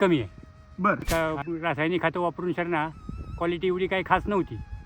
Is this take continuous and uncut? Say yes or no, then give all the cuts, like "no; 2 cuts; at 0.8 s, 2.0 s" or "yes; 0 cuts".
no; 1 cut; at 1.0 s